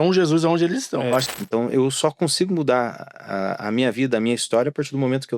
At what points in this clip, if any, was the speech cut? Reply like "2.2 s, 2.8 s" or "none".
1.3 s